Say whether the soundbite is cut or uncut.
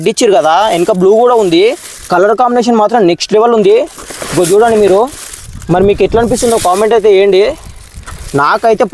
uncut